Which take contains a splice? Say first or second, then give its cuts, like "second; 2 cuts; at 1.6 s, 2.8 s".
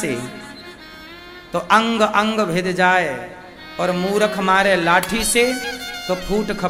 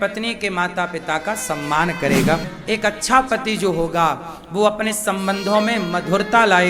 second; 1 cut; at 2.4 s